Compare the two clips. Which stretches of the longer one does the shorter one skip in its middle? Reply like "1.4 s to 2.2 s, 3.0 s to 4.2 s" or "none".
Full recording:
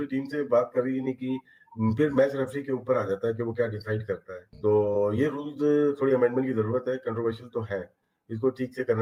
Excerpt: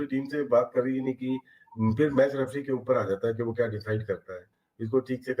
4.5 s to 8.0 s